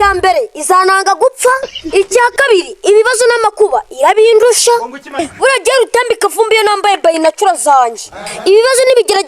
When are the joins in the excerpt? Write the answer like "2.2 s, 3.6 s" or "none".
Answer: 5.2 s